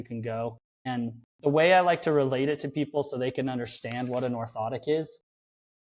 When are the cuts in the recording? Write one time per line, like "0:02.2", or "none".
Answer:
0:01.0